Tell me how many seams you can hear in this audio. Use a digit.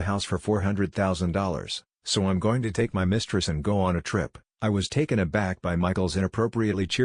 1